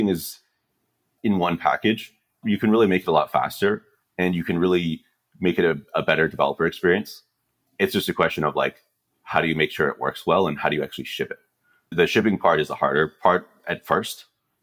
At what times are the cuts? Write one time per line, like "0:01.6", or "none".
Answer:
0:01.1
0:02.4
0:07.6
0:11.9